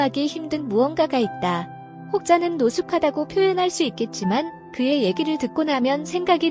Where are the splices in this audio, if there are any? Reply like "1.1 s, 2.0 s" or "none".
none